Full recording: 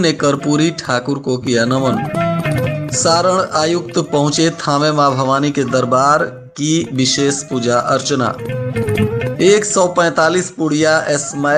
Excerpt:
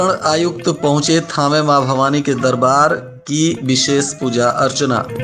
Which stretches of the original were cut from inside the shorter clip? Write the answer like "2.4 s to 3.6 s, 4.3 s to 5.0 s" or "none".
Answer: none